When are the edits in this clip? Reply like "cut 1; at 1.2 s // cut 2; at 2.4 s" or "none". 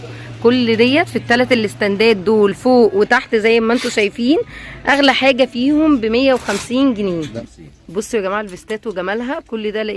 cut 1; at 7.3 s